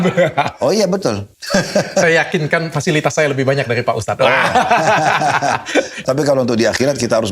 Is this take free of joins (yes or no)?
no